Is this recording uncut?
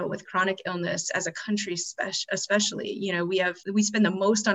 no; 1 cut; at 3.6 s

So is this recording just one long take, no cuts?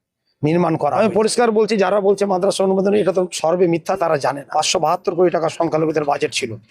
no; 2 cuts; at 1.0 s, 4.5 s

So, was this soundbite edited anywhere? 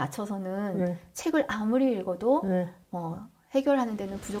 no; 0 cuts

